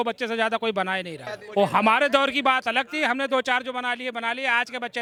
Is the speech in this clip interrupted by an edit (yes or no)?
no